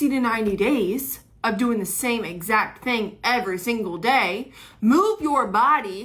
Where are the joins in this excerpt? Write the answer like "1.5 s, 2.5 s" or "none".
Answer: 2.1 s